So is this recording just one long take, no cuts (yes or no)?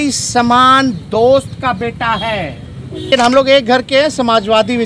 no